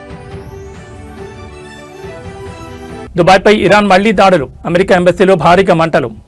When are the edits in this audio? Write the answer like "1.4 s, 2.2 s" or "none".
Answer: none